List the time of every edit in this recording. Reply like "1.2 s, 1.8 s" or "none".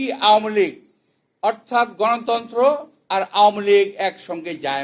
2.9 s